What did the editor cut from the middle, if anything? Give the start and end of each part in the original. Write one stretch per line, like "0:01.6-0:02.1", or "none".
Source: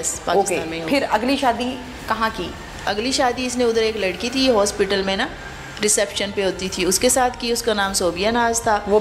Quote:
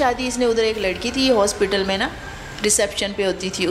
none